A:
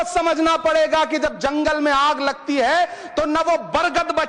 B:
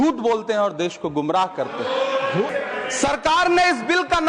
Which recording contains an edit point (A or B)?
B